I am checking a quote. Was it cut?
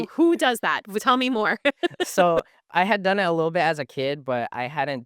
yes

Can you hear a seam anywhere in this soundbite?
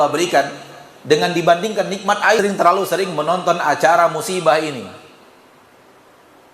yes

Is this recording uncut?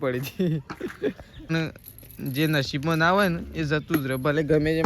no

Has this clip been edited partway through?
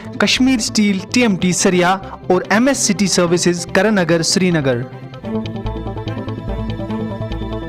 yes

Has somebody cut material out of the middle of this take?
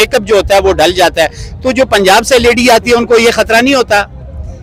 no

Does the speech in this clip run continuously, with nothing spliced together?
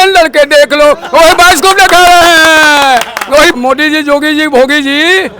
no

